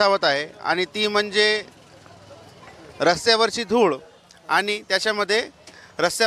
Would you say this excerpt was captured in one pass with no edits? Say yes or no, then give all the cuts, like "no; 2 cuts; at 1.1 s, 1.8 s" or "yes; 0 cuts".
yes; 0 cuts